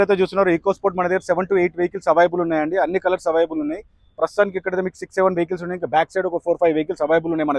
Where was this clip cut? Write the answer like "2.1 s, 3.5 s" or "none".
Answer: none

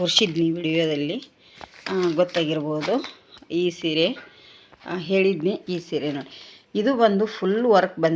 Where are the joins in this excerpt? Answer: 5.6 s

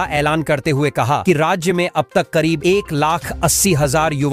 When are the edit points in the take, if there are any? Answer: none

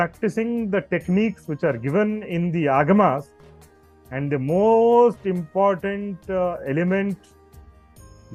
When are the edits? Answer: none

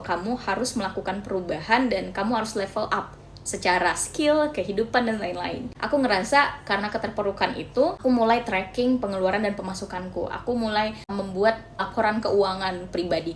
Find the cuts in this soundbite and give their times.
none

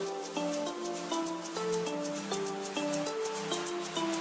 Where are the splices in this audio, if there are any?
none

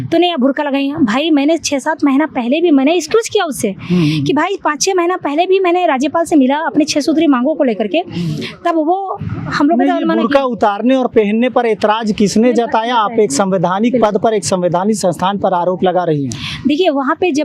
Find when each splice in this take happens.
none

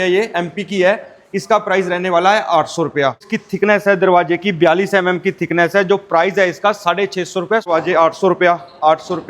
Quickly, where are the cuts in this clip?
3.3 s, 7.7 s

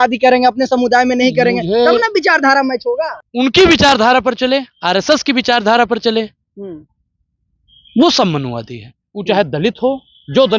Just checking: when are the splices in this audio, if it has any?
3.2 s

